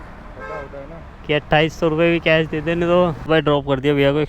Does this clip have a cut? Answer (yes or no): yes